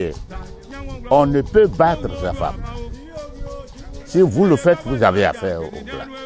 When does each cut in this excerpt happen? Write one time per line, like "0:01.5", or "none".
none